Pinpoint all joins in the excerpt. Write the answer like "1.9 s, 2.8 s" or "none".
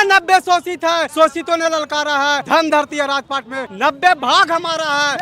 1.1 s, 2.4 s, 3.6 s